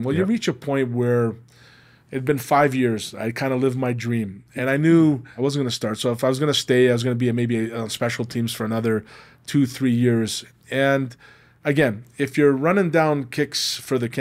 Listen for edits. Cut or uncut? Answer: cut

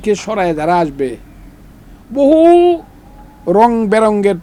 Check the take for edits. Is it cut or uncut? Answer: uncut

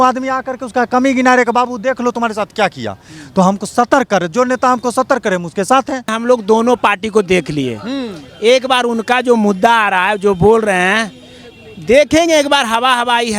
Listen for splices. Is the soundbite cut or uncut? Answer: cut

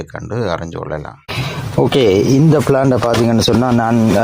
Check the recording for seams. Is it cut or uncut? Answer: cut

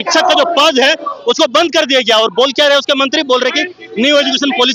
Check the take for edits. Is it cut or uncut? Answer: uncut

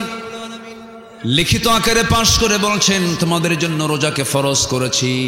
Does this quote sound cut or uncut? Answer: uncut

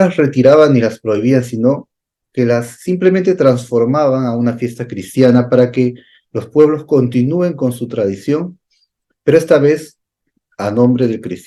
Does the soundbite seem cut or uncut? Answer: uncut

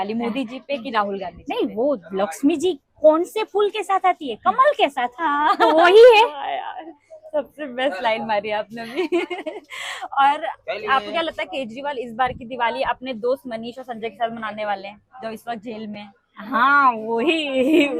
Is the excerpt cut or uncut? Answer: uncut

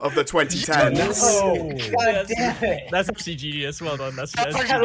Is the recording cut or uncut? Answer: uncut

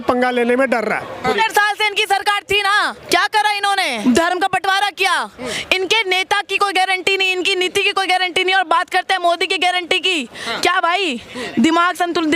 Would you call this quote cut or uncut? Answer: cut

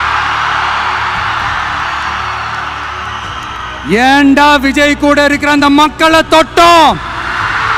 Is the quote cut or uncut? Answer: uncut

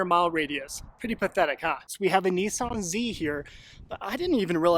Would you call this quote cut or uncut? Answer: cut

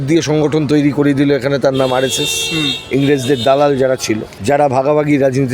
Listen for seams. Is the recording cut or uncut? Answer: cut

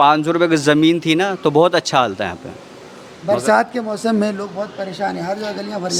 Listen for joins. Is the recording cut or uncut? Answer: uncut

